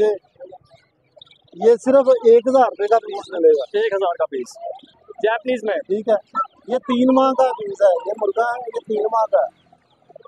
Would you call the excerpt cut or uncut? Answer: cut